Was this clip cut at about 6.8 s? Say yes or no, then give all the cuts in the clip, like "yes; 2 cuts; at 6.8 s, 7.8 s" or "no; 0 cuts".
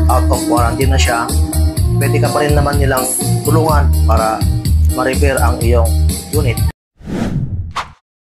yes; 1 cut; at 6.8 s